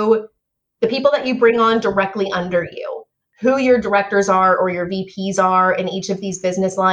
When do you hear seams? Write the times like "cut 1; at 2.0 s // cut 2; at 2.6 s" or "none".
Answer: none